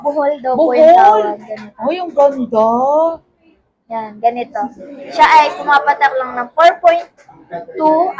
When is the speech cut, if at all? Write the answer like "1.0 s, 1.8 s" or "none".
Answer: none